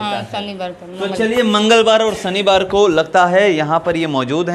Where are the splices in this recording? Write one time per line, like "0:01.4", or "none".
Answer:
none